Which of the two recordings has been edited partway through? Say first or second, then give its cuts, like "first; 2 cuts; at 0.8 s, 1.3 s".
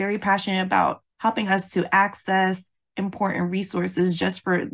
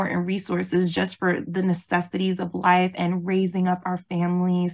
first; 1 cut; at 1.0 s